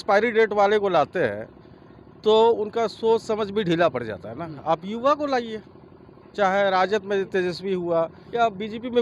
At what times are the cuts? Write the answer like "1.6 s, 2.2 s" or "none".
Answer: none